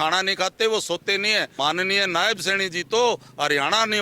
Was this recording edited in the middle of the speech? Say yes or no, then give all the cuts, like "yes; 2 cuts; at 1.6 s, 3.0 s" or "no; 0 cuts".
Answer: yes; 1 cut; at 1.5 s